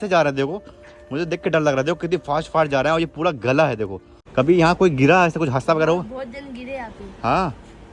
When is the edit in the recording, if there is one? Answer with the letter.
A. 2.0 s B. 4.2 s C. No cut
B